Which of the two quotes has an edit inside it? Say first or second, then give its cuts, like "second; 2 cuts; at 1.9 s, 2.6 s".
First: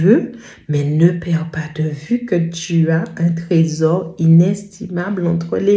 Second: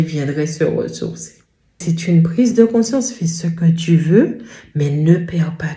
second; 1 cut; at 1.8 s